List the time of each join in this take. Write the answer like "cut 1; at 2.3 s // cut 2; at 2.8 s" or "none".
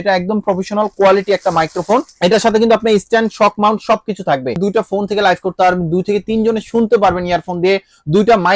cut 1; at 2.1 s // cut 2; at 4.6 s